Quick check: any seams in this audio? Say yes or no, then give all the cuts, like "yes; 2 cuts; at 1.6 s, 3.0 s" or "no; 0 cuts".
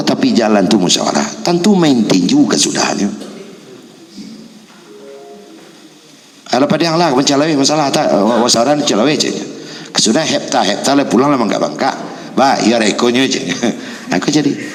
no; 0 cuts